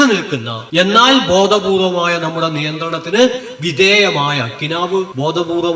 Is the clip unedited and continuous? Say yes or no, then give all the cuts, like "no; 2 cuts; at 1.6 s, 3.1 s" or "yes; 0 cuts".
yes; 0 cuts